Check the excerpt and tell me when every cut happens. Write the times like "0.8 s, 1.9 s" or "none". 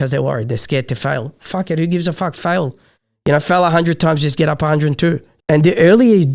5.3 s